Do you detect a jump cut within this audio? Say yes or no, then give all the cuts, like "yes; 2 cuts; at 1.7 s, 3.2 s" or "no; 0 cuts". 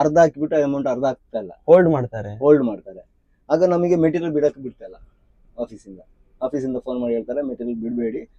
no; 0 cuts